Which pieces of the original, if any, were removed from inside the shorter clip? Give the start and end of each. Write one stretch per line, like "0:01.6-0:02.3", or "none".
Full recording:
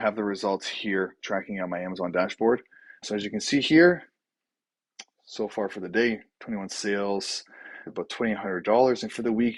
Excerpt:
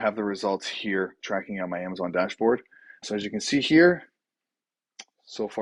none